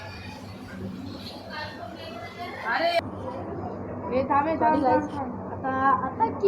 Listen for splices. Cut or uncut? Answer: cut